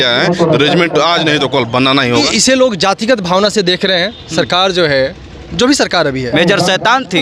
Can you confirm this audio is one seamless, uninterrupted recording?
no; 2 cuts; at 2.3 s, 6.3 s

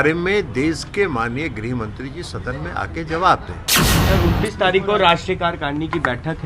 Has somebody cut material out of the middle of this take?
yes; 1 cut; at 3.9 s

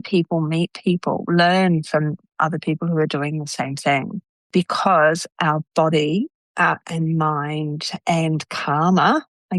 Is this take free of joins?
yes; 0 cuts

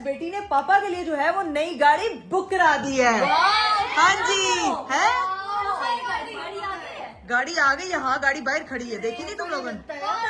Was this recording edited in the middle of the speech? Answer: no; 0 cuts

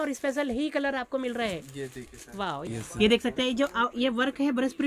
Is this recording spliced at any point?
yes; 1 cut; at 2.6 s

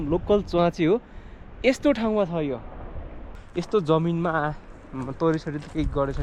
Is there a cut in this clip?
yes; 1 cut; at 3.3 s

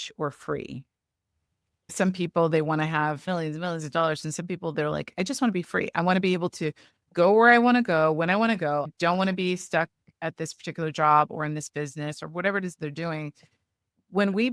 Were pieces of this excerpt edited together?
no; 0 cuts

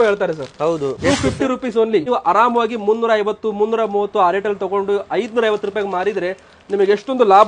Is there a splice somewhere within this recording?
yes; 2 cuts; at 0.9 s, 2.0 s

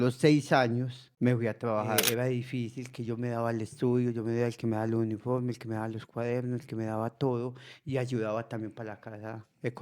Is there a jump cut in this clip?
yes; 2 cuts; at 1.0 s, 2.1 s

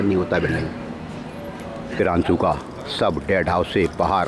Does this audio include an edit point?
yes; 1 cut; at 1.9 s

